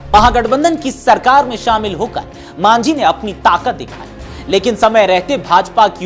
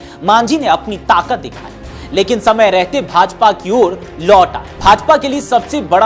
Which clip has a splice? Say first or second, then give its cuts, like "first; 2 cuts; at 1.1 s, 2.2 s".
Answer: second; 1 cut; at 4.6 s